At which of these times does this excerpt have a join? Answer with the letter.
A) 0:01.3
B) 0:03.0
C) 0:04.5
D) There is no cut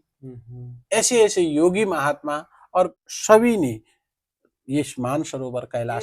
B